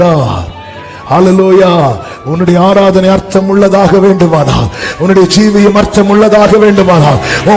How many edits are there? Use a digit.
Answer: 0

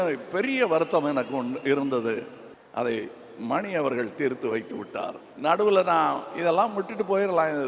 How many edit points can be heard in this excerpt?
1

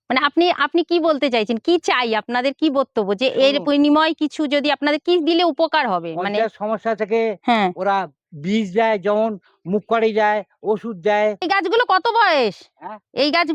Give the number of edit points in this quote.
1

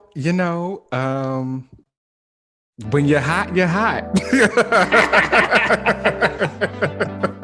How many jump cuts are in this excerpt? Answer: 0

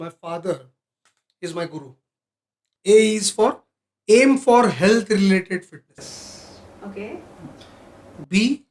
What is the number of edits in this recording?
1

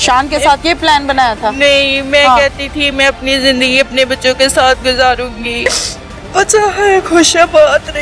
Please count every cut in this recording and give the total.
1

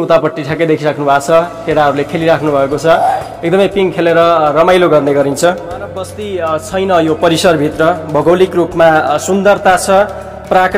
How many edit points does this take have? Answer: 1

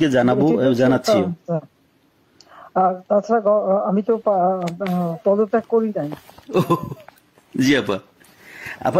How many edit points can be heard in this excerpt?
0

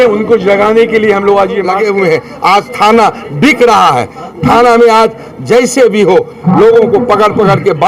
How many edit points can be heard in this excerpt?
1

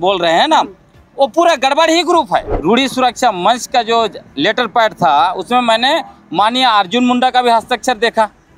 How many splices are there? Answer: 1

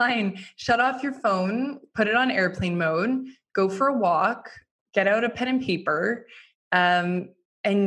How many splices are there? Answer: 0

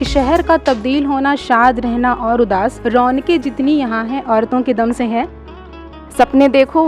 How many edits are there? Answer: 2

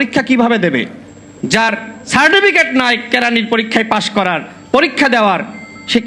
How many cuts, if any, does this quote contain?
0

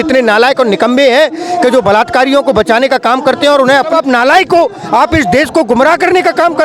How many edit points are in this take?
1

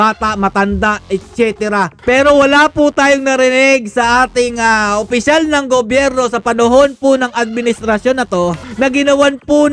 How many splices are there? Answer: 2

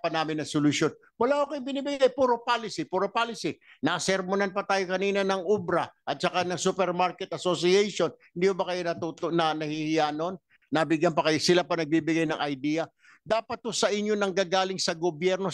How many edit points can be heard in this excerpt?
0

